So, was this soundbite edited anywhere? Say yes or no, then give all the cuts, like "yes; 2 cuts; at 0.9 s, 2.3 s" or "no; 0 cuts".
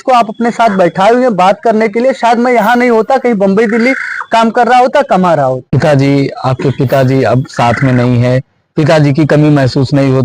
yes; 1 cut; at 5.7 s